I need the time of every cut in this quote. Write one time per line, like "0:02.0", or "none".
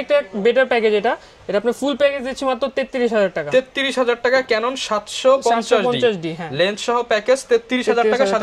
none